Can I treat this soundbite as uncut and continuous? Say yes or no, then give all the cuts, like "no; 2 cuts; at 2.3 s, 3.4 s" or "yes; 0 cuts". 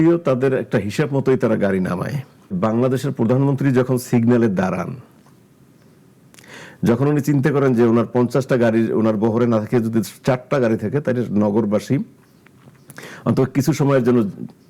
no; 1 cut; at 2.6 s